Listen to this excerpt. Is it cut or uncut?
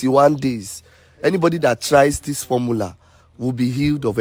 uncut